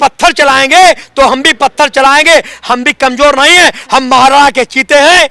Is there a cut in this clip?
no; 0 cuts

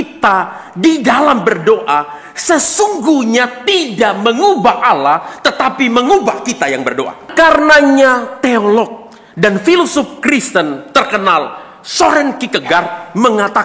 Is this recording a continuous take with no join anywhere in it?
no; 1 cut; at 7.3 s

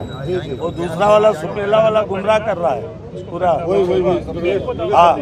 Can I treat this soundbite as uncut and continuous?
yes; 0 cuts

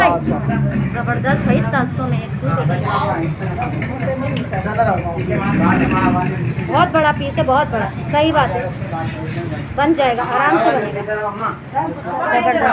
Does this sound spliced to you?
no; 0 cuts

